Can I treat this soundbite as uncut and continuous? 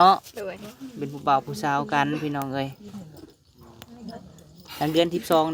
yes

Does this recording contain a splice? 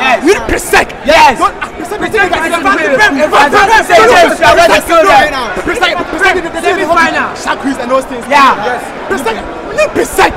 no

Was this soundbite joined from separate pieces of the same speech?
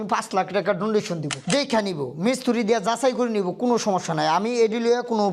yes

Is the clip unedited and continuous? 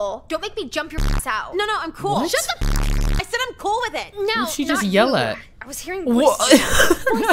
yes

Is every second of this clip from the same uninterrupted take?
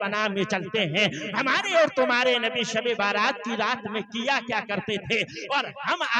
yes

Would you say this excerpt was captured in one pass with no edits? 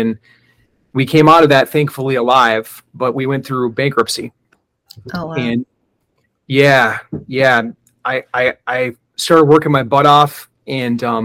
yes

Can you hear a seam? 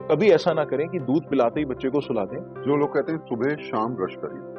yes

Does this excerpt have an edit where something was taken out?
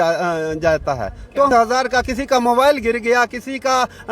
yes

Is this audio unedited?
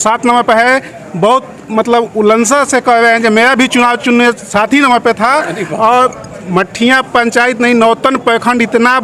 yes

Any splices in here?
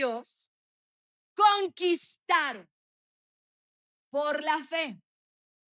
no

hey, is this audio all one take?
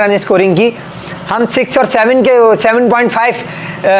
yes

